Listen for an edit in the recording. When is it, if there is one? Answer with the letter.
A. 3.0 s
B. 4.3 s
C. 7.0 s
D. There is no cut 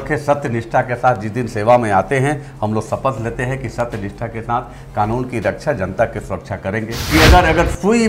C